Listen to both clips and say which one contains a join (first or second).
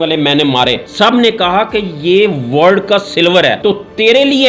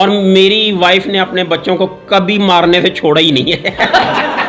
first